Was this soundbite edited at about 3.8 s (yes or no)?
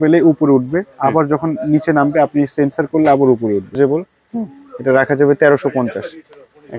yes